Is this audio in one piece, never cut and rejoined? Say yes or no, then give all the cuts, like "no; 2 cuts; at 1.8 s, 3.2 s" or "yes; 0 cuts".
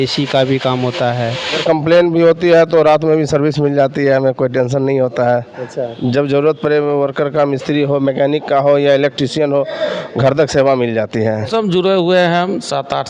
no; 2 cuts; at 1.6 s, 11.5 s